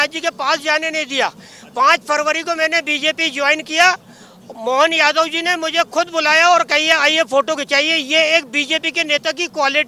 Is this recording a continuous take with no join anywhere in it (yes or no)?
yes